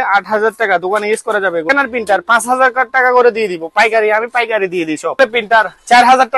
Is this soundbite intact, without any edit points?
no; 2 cuts; at 1.7 s, 5.2 s

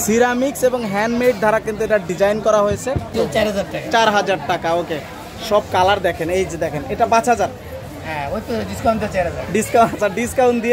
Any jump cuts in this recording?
yes; 1 cut; at 3.1 s

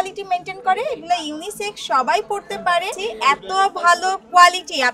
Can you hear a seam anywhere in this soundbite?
yes; 1 cut; at 3.0 s

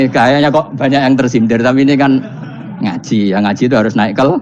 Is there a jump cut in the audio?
no; 0 cuts

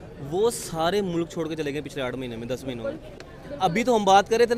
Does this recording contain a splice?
no; 0 cuts

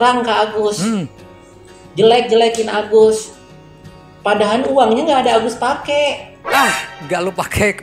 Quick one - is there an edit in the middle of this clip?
no; 0 cuts

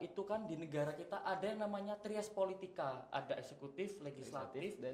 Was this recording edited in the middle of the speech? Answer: no; 0 cuts

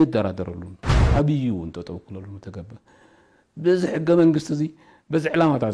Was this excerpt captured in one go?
no; 1 cut; at 1.0 s

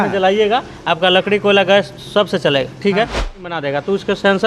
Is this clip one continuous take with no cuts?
no; 1 cut; at 3.3 s

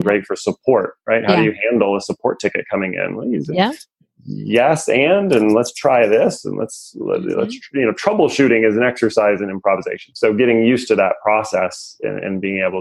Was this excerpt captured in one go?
yes; 0 cuts

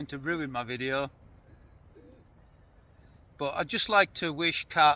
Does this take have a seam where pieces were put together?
no; 0 cuts

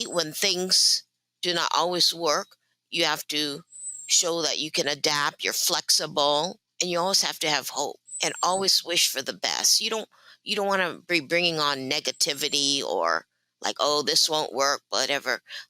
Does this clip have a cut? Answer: yes; 2 cuts; at 6.7 s, 8.1 s

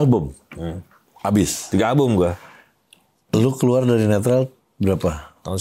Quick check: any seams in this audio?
no; 0 cuts

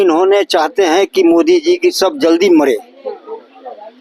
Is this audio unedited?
yes; 0 cuts

